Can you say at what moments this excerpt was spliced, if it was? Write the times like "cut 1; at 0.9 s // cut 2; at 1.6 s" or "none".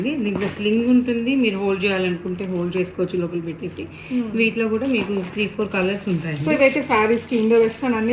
none